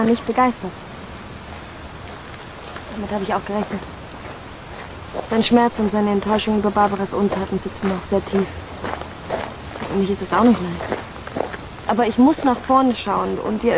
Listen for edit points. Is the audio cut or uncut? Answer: cut